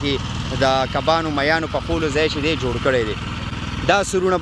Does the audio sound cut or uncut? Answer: uncut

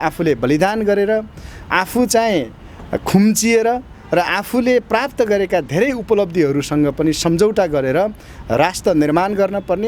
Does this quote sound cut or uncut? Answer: uncut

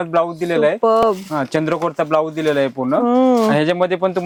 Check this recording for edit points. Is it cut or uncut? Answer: uncut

